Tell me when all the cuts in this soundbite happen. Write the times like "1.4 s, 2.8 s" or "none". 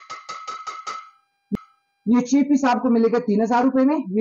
none